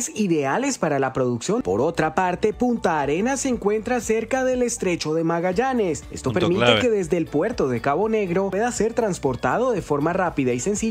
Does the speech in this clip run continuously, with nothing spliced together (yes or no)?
no